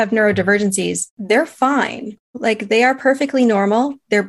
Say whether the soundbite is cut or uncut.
cut